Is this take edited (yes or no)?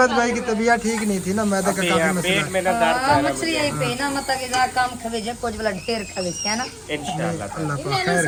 no